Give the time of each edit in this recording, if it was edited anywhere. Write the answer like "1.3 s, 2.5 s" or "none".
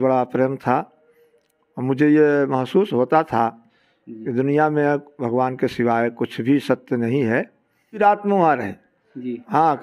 8.0 s